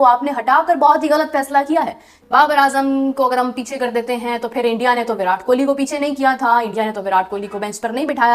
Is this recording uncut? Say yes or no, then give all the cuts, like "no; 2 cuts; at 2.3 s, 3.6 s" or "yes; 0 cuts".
no; 1 cut; at 2.2 s